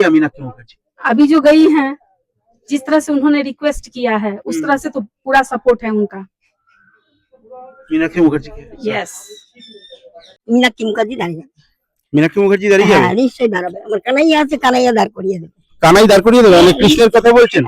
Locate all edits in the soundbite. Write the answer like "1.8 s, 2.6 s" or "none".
10.3 s